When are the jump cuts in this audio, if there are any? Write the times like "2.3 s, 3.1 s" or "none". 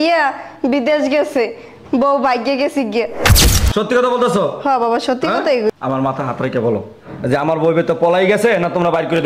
3.2 s